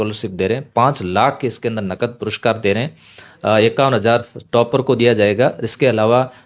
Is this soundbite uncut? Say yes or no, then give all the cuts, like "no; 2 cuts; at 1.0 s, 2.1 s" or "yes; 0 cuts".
yes; 0 cuts